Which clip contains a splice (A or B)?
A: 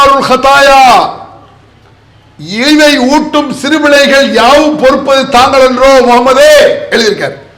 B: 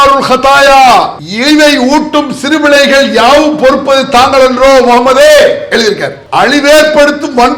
B